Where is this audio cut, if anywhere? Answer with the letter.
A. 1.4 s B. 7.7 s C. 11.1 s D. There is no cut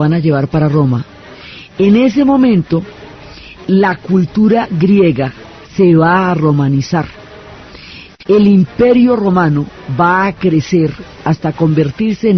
A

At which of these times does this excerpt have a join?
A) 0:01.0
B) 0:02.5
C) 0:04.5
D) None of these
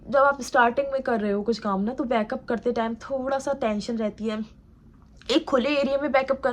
D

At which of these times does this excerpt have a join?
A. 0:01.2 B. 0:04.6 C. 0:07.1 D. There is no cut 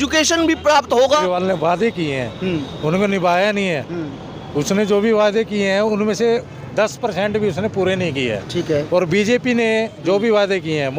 A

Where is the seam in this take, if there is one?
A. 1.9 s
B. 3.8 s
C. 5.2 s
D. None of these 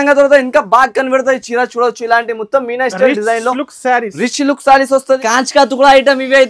C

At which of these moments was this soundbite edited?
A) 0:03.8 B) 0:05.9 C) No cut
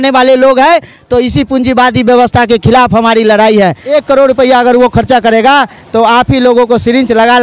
A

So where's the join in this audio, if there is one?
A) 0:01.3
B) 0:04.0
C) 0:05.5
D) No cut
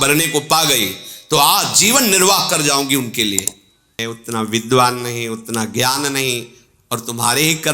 B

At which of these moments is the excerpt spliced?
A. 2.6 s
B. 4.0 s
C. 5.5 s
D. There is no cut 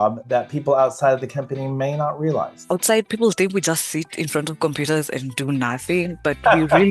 A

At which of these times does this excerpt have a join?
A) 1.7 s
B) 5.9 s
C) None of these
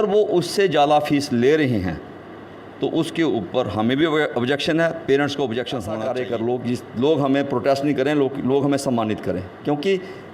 B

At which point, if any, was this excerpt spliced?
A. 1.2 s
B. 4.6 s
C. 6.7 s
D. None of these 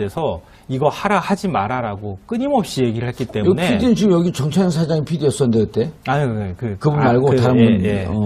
C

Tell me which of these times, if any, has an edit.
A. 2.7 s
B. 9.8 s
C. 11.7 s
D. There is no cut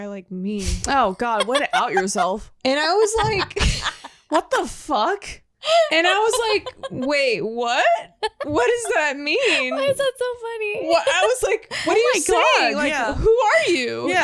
C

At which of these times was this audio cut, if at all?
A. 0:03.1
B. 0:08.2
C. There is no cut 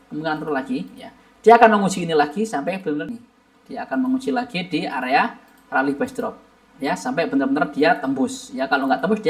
A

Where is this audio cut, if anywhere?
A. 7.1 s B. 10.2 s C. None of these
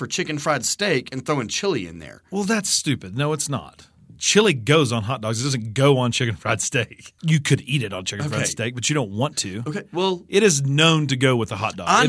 A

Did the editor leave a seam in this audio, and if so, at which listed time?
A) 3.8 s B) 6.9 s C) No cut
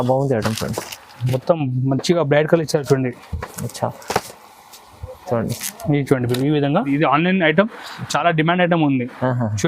B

